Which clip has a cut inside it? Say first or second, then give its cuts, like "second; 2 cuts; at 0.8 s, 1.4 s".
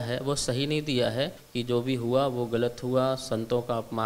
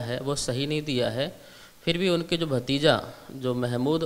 first; 1 cut; at 1.4 s